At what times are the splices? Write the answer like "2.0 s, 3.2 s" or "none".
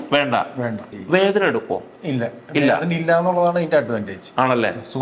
0.9 s